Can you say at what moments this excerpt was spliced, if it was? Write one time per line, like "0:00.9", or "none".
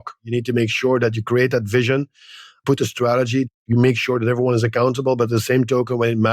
0:02.6